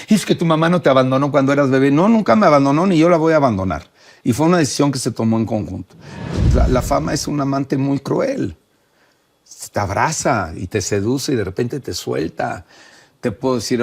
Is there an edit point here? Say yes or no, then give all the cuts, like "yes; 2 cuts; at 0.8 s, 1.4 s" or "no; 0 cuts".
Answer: yes; 2 cuts; at 6.3 s, 12.9 s